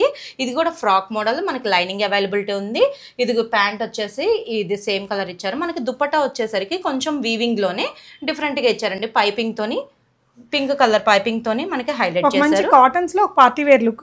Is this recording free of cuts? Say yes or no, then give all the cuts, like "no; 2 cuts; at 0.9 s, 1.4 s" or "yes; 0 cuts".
yes; 0 cuts